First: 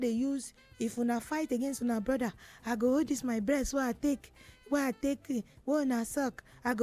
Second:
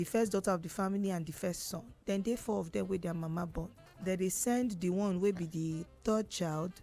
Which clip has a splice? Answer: second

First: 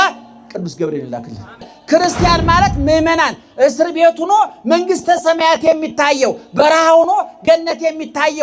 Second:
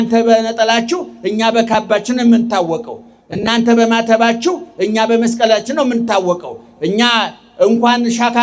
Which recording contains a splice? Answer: first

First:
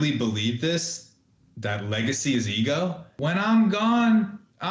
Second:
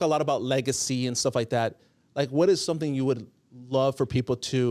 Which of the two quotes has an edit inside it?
first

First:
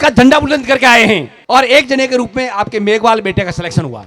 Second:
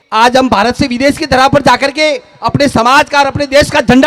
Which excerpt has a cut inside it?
first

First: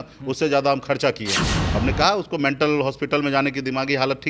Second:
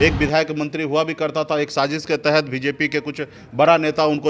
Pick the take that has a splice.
first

